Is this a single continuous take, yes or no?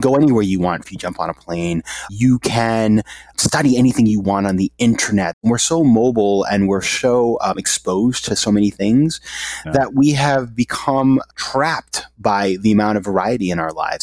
no